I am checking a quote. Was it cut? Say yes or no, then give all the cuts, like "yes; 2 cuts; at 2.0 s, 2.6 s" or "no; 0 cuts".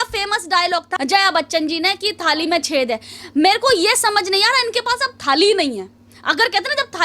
yes; 1 cut; at 0.9 s